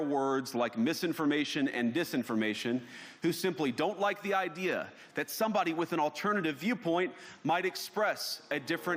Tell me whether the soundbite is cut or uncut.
uncut